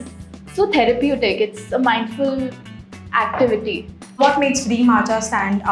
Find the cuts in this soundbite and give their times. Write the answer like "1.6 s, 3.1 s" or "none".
4.2 s